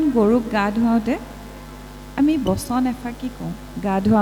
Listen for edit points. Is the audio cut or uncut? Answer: uncut